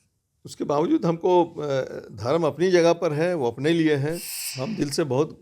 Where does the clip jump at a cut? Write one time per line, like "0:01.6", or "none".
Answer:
0:04.3

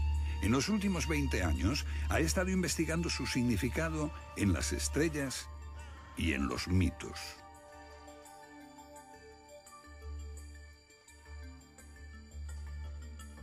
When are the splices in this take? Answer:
none

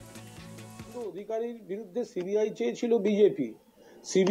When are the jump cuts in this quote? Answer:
0:00.9

